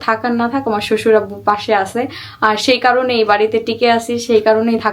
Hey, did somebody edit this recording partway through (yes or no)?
no